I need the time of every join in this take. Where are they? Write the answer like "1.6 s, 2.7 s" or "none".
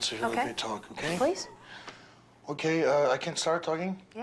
none

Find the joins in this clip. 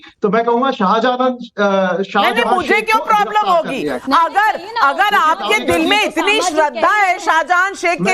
none

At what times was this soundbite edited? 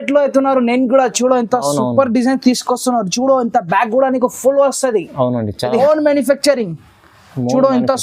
5.8 s

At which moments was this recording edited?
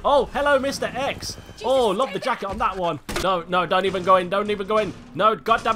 3.1 s

